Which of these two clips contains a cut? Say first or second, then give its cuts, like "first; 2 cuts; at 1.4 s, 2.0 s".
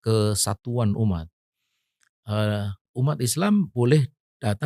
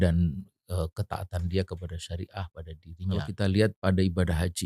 second; 1 cut; at 3.3 s